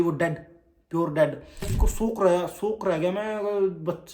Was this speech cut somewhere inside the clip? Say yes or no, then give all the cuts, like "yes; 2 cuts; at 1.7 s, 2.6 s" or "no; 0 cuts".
yes; 1 cut; at 1.7 s